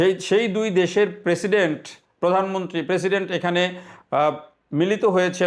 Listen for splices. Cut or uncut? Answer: uncut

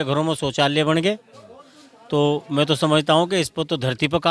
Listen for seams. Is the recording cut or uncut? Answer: uncut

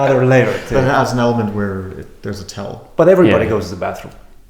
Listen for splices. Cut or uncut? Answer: uncut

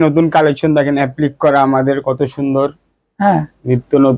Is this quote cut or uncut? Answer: uncut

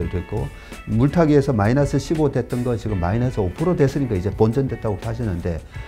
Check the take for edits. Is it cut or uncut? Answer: cut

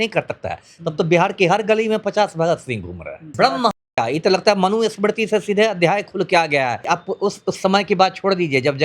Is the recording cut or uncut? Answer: cut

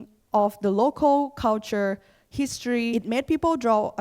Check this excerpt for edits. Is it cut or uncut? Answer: cut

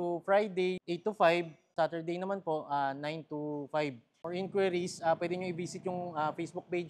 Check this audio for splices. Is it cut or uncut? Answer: cut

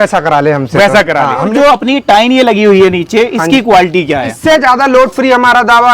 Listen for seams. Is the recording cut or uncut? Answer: cut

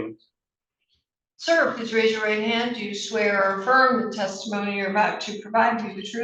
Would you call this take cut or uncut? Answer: uncut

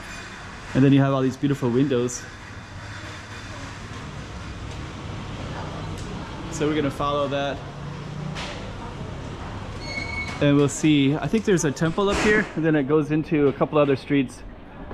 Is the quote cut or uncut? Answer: cut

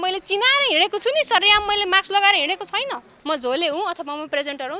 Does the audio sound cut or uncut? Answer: cut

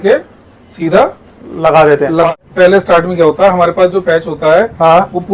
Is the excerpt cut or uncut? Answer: cut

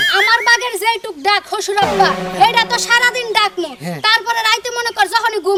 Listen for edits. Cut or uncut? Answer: uncut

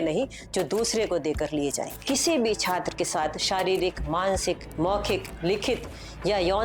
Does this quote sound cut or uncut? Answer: cut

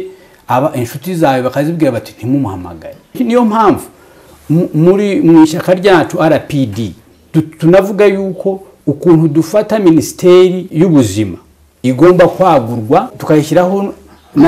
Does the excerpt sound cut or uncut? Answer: cut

